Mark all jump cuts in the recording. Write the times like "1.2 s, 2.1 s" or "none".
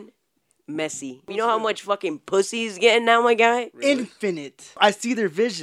1.3 s, 4.7 s